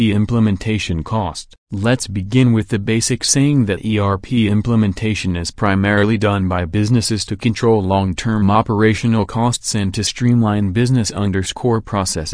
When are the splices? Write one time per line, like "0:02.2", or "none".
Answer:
0:01.1

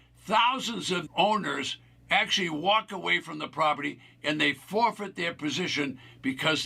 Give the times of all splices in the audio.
0:01.1

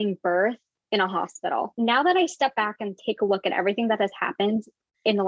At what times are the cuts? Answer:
0:01.7

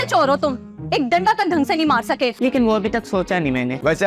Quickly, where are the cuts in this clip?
0:02.3

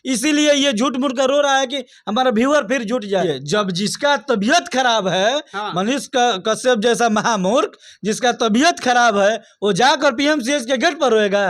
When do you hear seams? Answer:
0:03.2

